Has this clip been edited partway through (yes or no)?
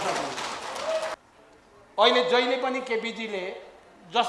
yes